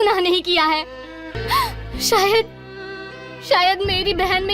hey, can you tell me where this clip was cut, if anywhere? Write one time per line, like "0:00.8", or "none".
0:01.4